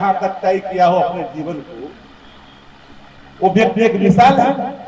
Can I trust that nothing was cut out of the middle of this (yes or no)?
yes